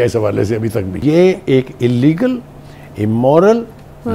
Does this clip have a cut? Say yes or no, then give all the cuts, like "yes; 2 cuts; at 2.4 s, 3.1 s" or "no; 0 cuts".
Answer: yes; 1 cut; at 1.0 s